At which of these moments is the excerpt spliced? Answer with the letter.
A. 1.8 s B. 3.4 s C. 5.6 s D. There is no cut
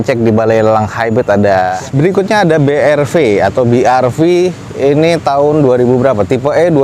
A